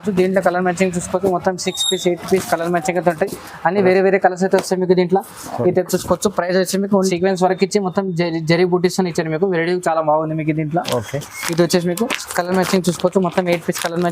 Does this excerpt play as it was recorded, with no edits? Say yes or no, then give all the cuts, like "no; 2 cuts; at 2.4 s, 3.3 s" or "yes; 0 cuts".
no; 1 cut; at 7.1 s